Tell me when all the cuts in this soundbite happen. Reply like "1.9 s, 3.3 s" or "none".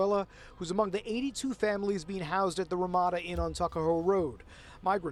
none